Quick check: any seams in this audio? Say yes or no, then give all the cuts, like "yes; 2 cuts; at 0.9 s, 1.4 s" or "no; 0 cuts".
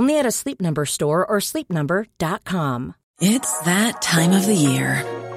yes; 1 cut; at 3.0 s